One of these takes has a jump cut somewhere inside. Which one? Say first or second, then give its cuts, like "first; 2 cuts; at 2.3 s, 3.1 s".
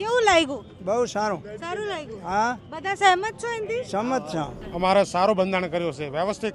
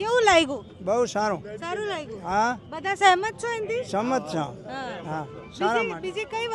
first; 1 cut; at 4.6 s